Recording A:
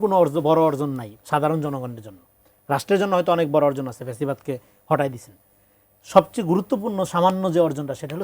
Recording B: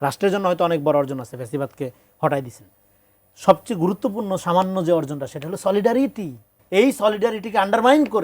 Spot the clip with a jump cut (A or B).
B